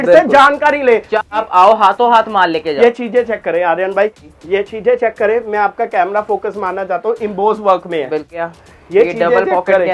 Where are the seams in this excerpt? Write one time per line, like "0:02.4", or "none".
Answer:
0:01.3
0:04.2
0:08.4